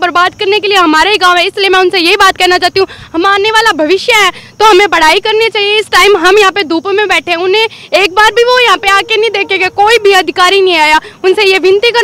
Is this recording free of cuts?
yes; 0 cuts

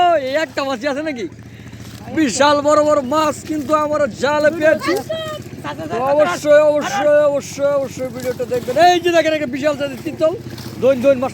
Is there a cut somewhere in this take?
no; 0 cuts

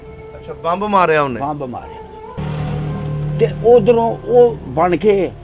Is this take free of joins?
no; 1 cut; at 2.4 s

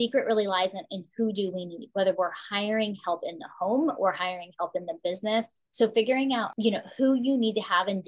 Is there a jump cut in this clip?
yes; 2 cuts; at 5.6 s, 6.5 s

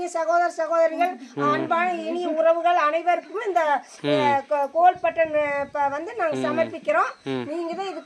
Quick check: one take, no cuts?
yes; 0 cuts

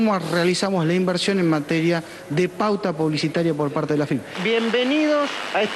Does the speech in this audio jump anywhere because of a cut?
yes; 1 cut; at 4.3 s

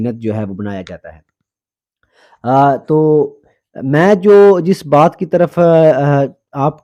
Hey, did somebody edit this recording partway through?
no; 0 cuts

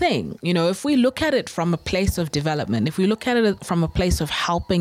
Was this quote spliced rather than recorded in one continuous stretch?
no; 0 cuts

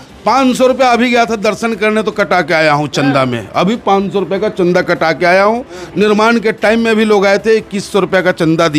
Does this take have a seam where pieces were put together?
no; 0 cuts

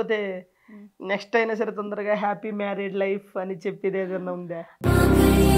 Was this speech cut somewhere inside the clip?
no; 0 cuts

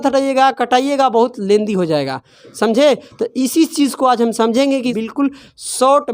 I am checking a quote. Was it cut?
yes; 1 cut; at 5.0 s

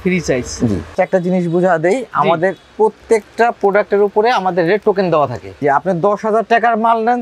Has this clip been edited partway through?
yes; 2 cuts; at 0.9 s, 5.6 s

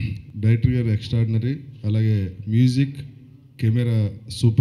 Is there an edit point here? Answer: no; 0 cuts

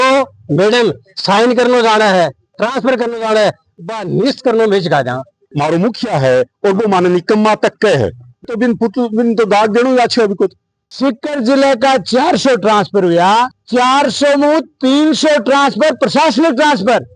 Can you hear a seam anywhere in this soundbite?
yes; 1 cut; at 10.9 s

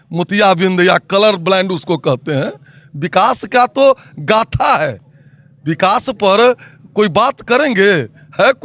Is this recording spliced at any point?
no; 0 cuts

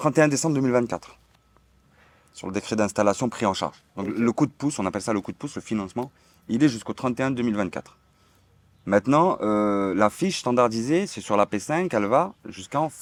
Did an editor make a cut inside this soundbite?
no; 0 cuts

